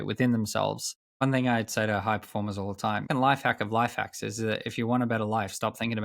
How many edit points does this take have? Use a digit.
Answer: 2